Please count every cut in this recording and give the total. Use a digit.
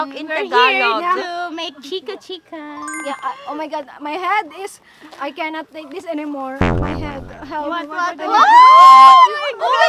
0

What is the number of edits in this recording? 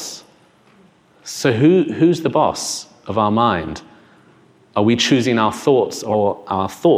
1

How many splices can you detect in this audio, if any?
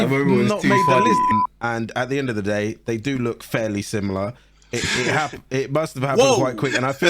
1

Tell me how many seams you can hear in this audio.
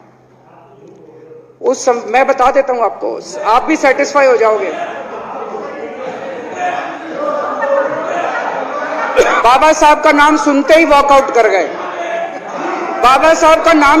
1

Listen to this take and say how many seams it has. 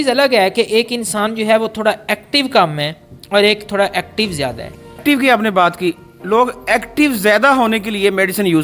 1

